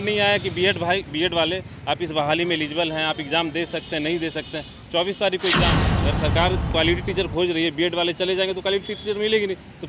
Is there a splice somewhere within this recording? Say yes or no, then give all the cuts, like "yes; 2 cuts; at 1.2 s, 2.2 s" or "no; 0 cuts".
yes; 1 cut; at 5.9 s